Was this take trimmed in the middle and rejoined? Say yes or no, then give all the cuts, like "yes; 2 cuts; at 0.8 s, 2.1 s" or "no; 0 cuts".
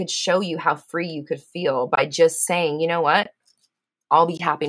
no; 0 cuts